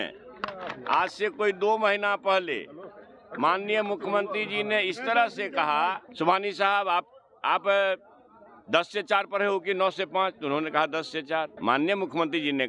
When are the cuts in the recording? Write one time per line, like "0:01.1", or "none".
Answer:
0:06.0
0:11.5